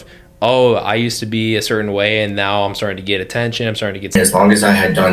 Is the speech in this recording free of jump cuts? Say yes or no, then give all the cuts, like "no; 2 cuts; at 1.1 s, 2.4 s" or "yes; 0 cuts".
no; 1 cut; at 4.2 s